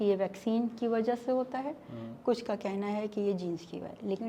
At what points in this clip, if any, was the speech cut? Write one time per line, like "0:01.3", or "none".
none

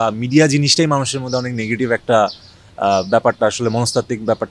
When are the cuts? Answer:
none

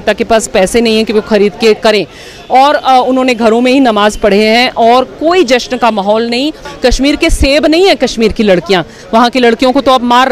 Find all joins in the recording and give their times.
0:06.7
0:09.0

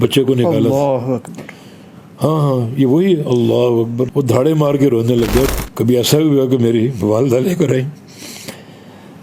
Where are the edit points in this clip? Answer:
0:04.1
0:05.5

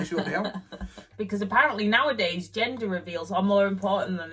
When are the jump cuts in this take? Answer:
0:01.1

